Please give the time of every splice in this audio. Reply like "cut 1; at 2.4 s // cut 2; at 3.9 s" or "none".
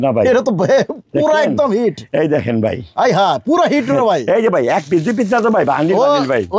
none